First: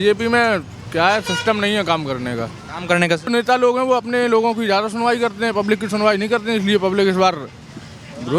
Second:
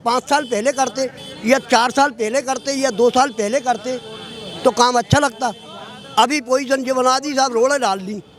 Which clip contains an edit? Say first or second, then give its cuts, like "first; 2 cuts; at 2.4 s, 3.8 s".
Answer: first; 1 cut; at 3.3 s